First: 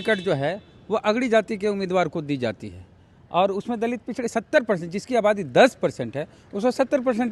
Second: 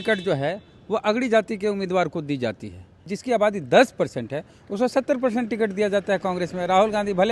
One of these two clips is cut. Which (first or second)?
second